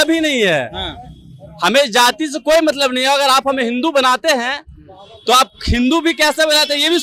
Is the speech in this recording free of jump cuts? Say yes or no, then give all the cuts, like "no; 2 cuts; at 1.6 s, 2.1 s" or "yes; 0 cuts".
yes; 0 cuts